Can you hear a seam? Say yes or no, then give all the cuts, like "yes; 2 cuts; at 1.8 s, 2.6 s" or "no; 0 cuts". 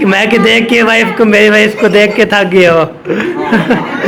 no; 0 cuts